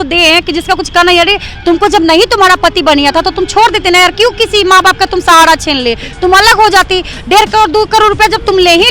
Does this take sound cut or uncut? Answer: uncut